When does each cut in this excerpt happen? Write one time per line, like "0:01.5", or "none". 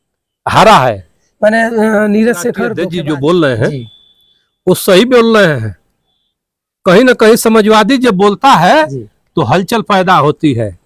0:02.8